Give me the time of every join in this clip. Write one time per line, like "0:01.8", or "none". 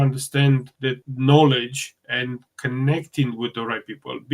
0:01.1